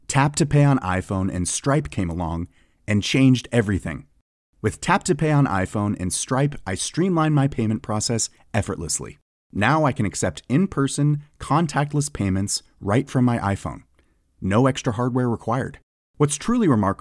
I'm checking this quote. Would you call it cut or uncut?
uncut